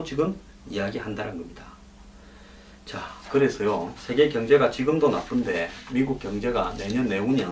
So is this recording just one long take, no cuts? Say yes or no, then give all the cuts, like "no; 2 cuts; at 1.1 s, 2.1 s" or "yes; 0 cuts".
no; 1 cut; at 5.8 s